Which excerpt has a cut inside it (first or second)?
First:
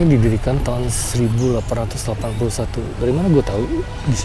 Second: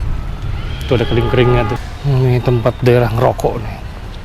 second